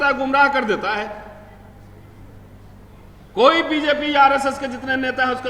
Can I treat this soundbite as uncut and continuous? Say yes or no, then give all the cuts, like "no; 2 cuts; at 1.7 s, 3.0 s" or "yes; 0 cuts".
yes; 0 cuts